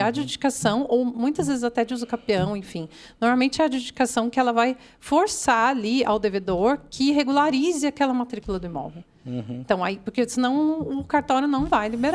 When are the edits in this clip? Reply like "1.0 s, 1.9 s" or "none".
none